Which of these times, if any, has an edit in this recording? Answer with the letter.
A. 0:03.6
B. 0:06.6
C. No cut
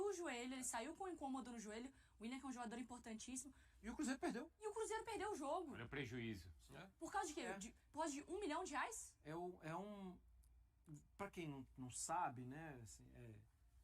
A